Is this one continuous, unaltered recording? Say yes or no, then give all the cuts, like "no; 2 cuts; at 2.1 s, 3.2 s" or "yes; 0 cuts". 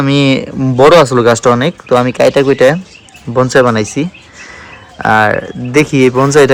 yes; 0 cuts